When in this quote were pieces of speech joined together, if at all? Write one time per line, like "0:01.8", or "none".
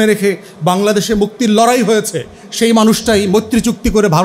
none